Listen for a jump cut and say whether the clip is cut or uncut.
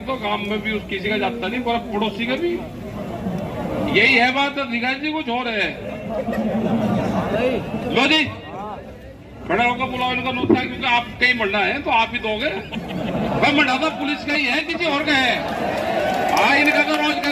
uncut